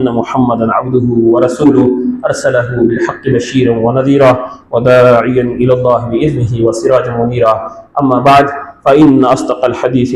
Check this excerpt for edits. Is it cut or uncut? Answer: uncut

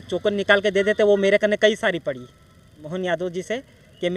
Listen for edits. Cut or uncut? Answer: cut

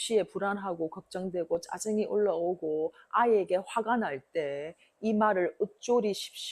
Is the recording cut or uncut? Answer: uncut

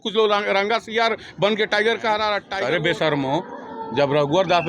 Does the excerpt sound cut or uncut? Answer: cut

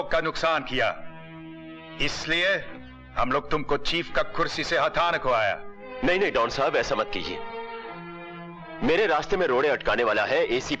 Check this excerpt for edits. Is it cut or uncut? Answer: uncut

